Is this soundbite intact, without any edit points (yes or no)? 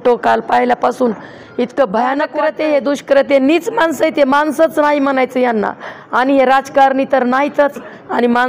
no